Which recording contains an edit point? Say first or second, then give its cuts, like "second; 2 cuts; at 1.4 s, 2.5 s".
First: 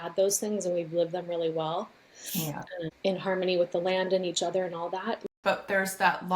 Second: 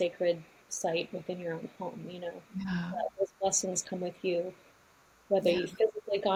first; 1 cut; at 5.2 s